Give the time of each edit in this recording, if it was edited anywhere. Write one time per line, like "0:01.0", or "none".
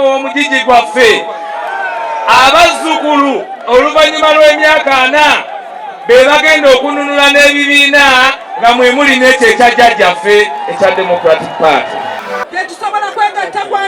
0:12.2